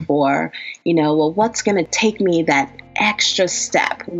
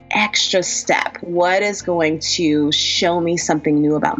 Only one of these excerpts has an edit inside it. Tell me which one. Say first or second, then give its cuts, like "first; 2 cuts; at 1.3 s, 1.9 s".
first; 1 cut; at 1.9 s